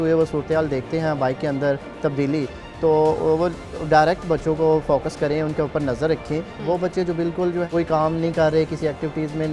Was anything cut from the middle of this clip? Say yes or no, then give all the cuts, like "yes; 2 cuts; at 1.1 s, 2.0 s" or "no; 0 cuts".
yes; 2 cuts; at 6.5 s, 7.7 s